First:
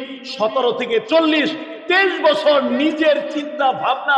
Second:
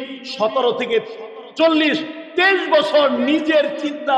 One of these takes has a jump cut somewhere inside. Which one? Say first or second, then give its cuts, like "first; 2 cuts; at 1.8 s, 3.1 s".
first; 1 cut; at 1.1 s